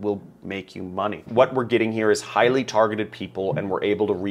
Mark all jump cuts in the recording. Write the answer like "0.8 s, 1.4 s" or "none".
1.2 s